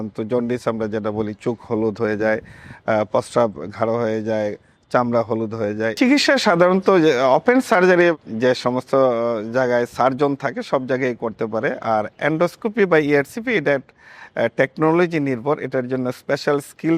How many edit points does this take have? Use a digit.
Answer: 2